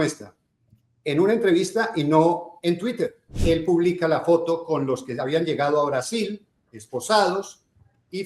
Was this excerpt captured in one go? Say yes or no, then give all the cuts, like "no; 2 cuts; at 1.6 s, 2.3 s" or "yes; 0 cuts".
no; 1 cut; at 3.3 s